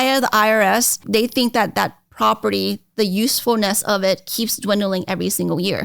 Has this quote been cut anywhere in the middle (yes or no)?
yes